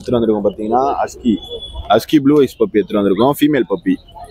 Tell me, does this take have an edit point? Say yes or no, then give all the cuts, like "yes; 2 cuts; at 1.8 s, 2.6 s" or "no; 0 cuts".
no; 0 cuts